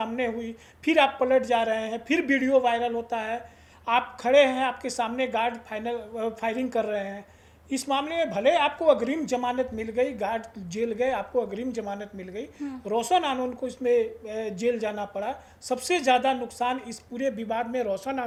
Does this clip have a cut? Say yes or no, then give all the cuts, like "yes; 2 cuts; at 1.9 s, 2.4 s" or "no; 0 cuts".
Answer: no; 0 cuts